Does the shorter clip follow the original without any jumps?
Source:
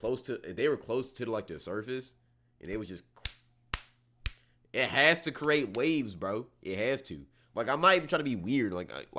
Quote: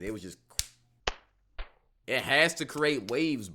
yes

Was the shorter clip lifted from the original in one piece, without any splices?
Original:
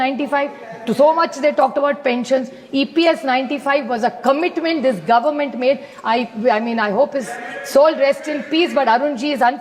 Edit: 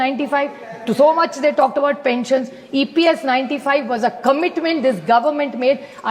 yes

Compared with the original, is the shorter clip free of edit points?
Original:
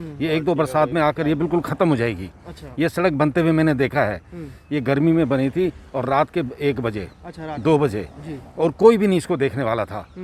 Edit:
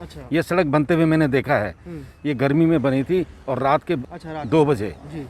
no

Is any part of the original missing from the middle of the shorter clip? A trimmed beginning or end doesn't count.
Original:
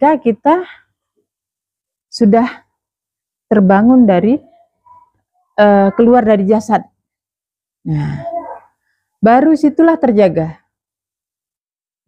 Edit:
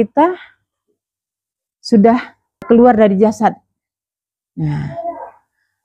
yes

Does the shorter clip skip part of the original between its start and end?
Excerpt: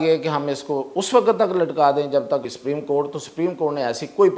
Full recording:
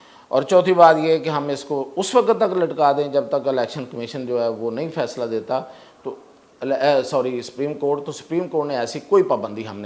yes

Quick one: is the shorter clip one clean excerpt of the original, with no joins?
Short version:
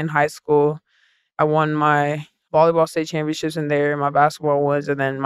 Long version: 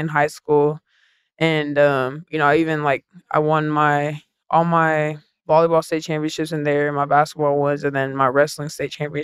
no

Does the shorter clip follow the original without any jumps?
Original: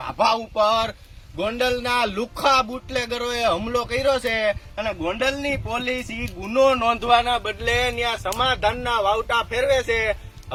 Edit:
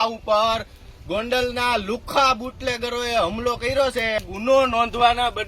no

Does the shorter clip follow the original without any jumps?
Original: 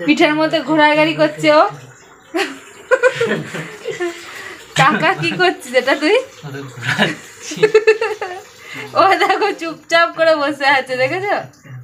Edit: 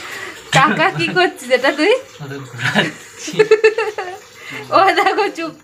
yes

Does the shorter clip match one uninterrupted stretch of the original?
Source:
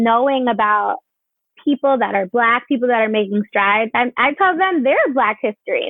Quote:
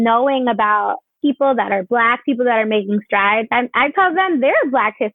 no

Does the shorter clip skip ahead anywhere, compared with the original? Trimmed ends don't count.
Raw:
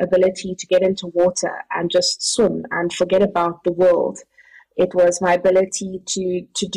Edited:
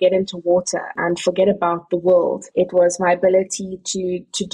yes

